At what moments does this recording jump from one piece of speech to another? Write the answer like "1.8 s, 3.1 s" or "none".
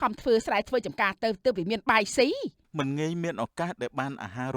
2.6 s

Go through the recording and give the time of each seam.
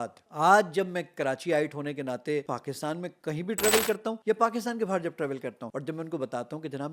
2.4 s, 4.2 s, 5.6 s

